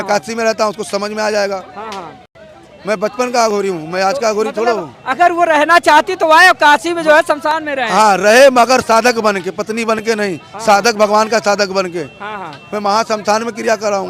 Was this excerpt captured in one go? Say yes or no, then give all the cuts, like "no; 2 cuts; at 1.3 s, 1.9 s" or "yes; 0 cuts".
yes; 0 cuts